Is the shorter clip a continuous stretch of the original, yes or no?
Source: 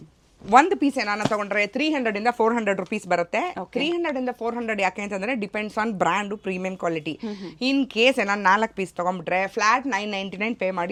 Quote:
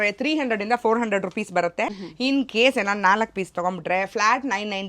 no